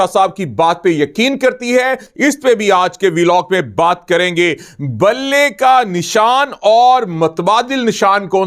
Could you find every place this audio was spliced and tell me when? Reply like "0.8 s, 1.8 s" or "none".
2.1 s